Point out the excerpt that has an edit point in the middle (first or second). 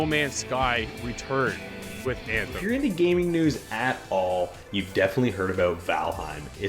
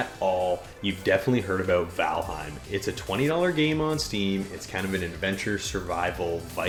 first